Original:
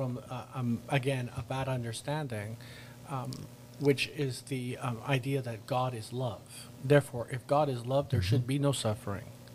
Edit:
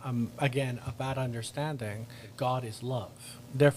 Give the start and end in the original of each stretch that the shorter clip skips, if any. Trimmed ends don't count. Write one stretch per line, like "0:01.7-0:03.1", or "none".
0:02.8-0:05.6

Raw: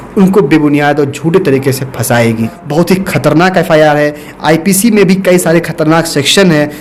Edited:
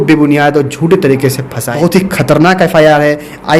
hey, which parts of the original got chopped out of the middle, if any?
0:02.0-0:02.6

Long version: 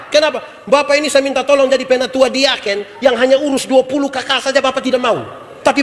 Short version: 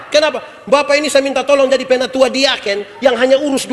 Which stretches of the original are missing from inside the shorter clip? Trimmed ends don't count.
none

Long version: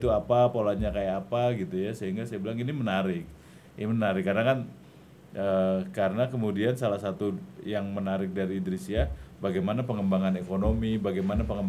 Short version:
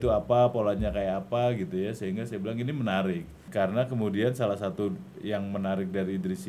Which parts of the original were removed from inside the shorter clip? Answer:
0:03.5-0:05.9

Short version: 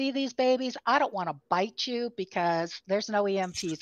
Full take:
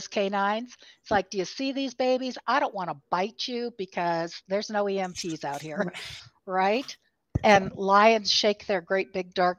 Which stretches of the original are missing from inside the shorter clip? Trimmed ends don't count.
none

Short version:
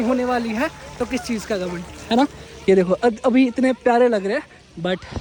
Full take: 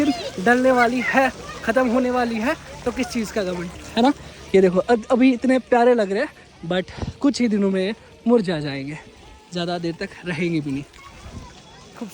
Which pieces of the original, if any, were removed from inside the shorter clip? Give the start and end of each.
none

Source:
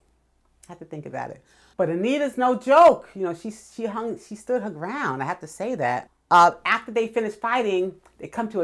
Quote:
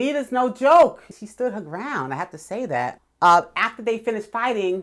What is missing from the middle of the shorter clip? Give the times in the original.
0:03.1-0:04.2

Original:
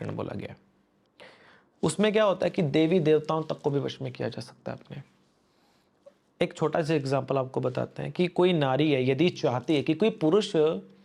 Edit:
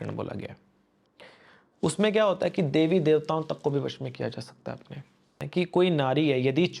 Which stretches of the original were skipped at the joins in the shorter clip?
0:05.4-0:08.0

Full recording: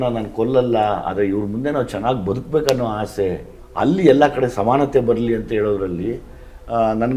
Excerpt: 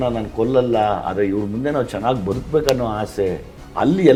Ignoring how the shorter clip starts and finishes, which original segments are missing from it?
none

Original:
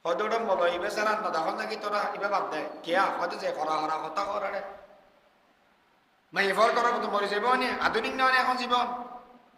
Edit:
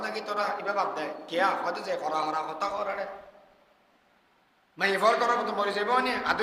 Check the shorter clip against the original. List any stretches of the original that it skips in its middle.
none

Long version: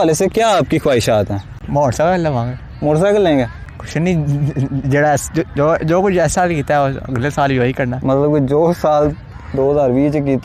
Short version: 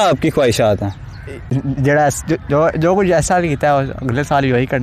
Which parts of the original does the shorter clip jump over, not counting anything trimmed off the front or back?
0:01.7-0:04.3

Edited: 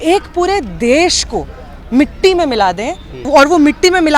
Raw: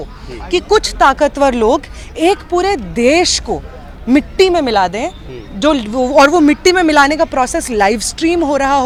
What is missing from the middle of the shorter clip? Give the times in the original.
0:05.4-0:06.1

